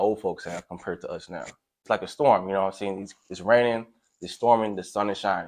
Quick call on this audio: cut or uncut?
cut